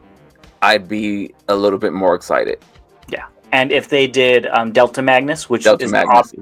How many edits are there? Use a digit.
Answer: 0